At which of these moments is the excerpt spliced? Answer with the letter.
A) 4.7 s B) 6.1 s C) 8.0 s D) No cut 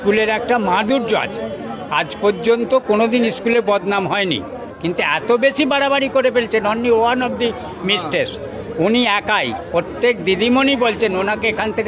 A